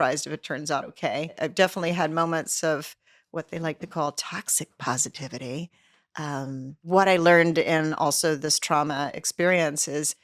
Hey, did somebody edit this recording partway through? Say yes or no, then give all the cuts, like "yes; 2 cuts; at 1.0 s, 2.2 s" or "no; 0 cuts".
yes; 2 cuts; at 1.4 s, 6.8 s